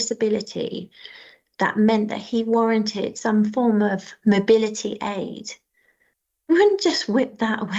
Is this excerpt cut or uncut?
uncut